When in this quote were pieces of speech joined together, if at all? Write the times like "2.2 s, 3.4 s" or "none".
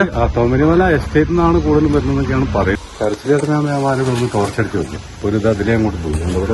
2.8 s, 5.0 s